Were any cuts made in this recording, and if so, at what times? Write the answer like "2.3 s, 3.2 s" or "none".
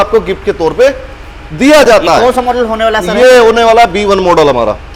none